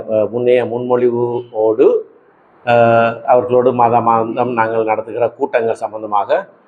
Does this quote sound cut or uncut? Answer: uncut